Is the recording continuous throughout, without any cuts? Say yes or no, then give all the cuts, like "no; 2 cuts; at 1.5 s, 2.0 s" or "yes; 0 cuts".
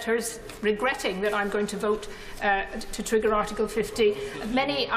yes; 0 cuts